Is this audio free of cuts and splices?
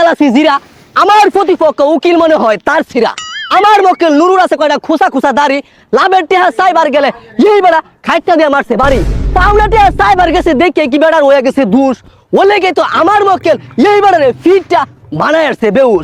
yes; 0 cuts

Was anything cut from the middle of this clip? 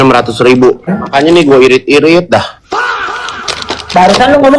yes; 1 cut; at 1.0 s

